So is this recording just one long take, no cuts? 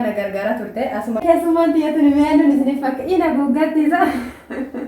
no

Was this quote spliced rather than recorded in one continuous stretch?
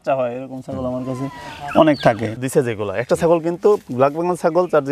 yes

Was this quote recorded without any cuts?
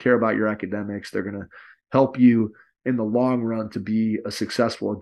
yes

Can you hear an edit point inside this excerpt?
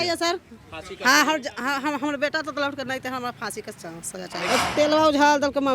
yes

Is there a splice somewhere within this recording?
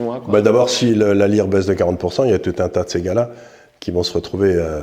no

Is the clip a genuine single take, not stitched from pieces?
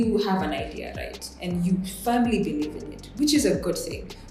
yes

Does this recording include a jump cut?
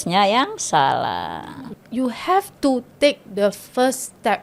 yes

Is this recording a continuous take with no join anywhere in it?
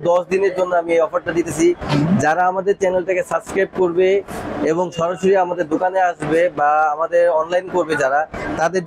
yes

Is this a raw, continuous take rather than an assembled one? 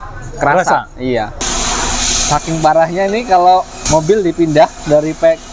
no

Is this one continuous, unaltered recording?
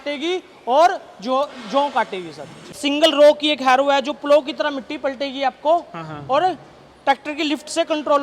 no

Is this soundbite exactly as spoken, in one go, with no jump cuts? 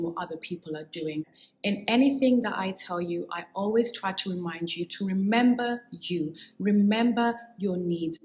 no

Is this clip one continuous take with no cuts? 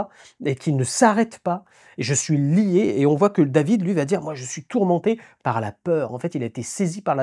yes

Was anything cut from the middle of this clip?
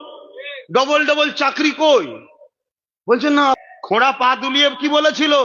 yes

